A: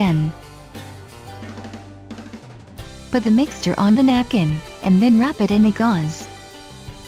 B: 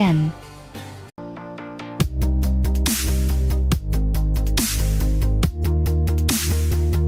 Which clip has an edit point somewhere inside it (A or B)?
A